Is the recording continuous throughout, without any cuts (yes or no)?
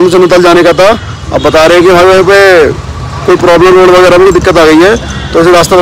yes